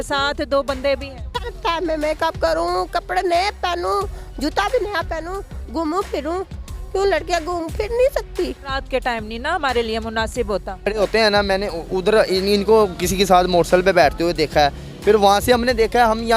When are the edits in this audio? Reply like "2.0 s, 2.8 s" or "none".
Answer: 1.4 s, 11.0 s